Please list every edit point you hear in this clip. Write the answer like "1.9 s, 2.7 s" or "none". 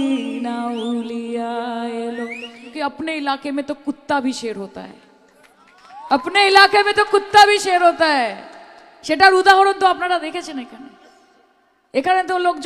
2.7 s